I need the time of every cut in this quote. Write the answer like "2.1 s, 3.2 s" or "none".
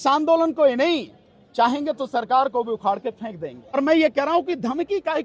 3.6 s